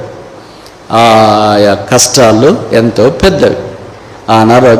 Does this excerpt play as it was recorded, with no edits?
yes; 0 cuts

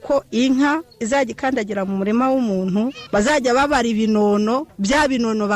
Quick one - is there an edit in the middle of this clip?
yes; 2 cuts; at 3.0 s, 4.7 s

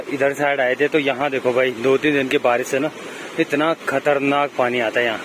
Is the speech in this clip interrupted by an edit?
no; 0 cuts

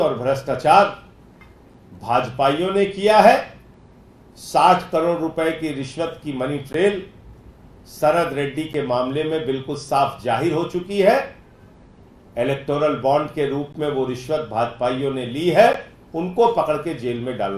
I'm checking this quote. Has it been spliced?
no; 0 cuts

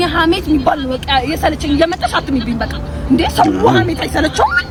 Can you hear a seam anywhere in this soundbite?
no; 0 cuts

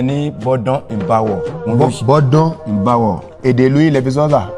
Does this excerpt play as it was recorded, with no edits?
no; 2 cuts; at 1.5 s, 3.3 s

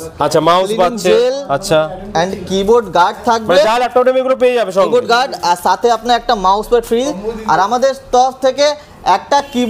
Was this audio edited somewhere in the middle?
no; 0 cuts

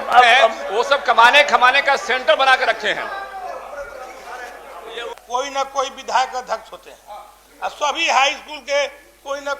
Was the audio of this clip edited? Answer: yes; 1 cut; at 5.1 s

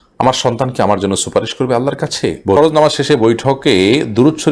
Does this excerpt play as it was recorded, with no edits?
no; 1 cut; at 2.6 s

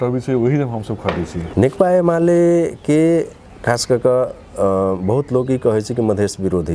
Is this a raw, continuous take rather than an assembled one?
no; 1 cut; at 1.4 s

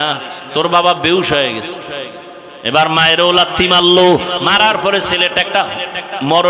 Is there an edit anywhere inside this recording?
no; 0 cuts

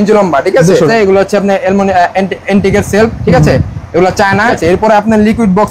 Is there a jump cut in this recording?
yes; 2 cuts; at 0.9 s, 4.6 s

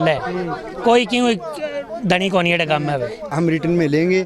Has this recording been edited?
yes; 1 cut; at 3.3 s

